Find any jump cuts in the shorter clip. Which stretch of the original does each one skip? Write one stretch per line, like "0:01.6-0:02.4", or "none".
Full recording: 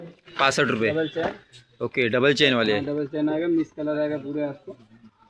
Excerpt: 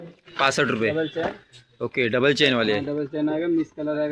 none